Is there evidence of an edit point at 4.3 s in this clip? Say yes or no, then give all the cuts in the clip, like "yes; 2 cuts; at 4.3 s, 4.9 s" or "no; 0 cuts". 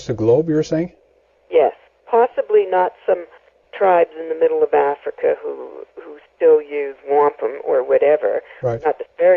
no; 1 cut; at 7.9 s